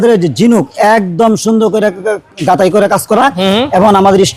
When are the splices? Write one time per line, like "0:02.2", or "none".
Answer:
none